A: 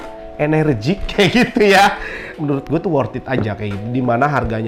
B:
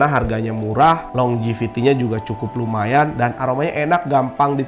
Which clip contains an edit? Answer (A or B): A